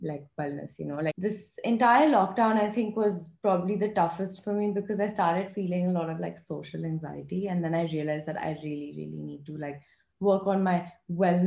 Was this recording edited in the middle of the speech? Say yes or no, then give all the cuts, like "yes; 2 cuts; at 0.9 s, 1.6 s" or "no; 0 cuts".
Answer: yes; 1 cut; at 1.1 s